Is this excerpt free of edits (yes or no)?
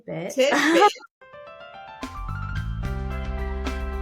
no